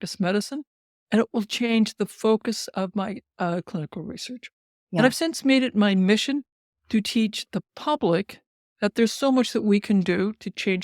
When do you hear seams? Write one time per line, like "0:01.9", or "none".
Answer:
none